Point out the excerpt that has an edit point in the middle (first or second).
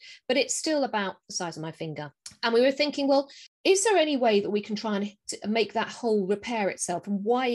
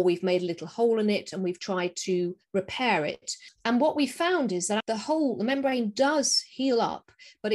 second